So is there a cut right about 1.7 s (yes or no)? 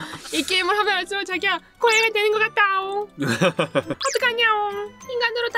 no